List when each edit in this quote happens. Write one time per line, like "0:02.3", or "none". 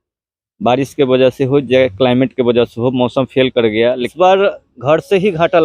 0:04.1